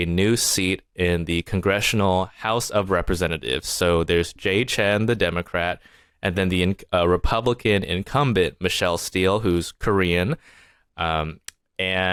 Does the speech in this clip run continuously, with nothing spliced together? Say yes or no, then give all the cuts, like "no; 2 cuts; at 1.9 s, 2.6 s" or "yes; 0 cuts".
yes; 0 cuts